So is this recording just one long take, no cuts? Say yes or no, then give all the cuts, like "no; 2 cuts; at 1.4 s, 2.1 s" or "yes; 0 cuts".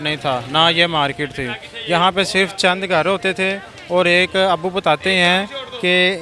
yes; 0 cuts